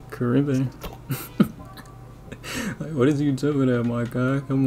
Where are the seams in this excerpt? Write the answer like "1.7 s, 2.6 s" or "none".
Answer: none